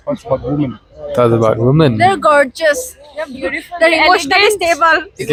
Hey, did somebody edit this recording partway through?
no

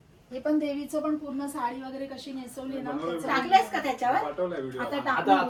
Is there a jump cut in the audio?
no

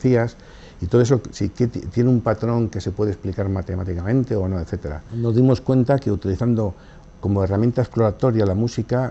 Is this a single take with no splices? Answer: yes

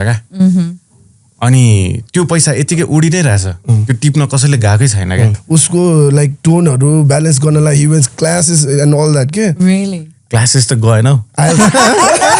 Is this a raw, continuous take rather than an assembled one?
no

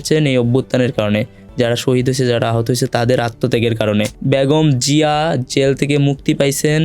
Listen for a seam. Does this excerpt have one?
no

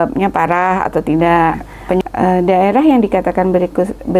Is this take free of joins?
no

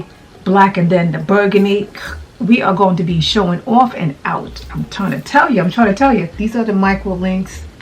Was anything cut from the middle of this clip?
yes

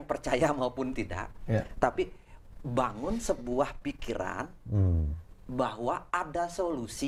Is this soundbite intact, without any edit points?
yes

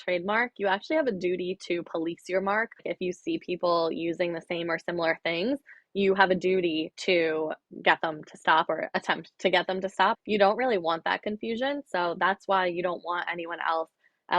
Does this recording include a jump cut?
yes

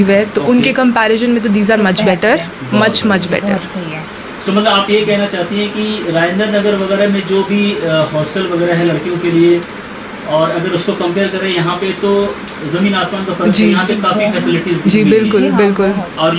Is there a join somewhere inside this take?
no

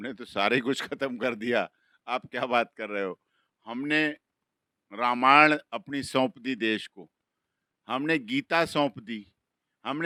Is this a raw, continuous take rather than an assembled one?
yes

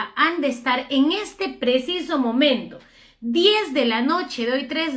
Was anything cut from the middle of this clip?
no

